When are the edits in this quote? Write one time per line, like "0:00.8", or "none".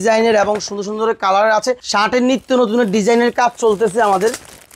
0:01.8

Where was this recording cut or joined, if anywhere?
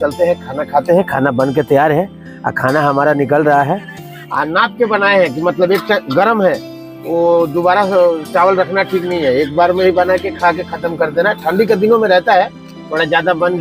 none

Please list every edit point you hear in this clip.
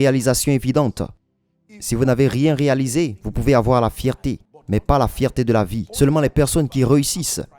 0:05.8

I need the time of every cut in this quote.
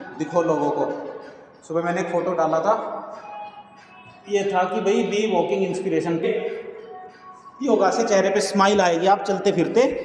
0:06.2

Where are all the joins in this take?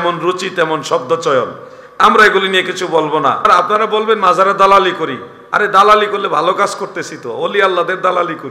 0:03.5

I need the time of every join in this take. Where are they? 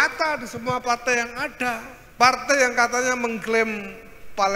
0:02.0

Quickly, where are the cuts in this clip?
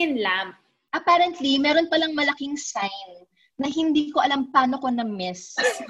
none

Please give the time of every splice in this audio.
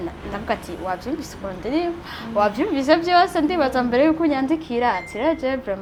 none

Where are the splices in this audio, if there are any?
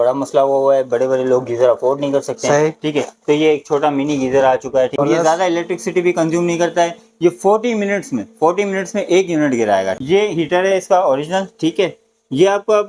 0:05.0
0:09.9

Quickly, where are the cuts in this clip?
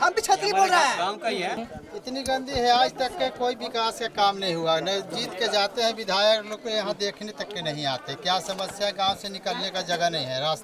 0:01.7

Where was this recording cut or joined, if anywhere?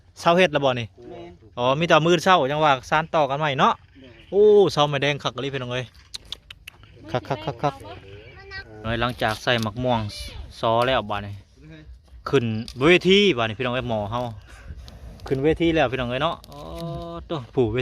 0:08.9

